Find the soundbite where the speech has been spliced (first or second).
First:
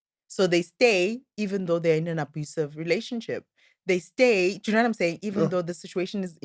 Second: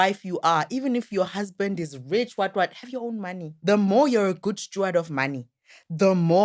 second